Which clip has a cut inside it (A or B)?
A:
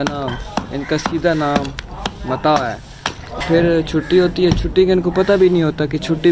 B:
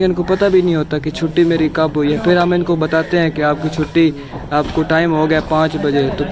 A